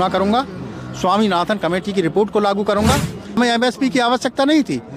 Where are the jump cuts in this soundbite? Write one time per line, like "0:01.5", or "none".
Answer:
0:03.4